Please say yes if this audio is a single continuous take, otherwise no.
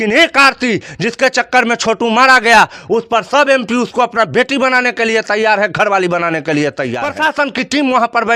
no